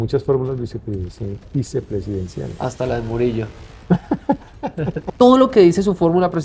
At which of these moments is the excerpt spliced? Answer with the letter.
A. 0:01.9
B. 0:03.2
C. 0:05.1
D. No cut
C